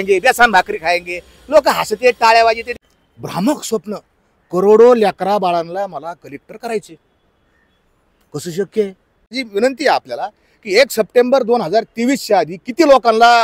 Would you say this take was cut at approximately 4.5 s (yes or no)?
no